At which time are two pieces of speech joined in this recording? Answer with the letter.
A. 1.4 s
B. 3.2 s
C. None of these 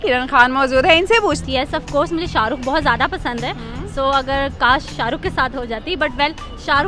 A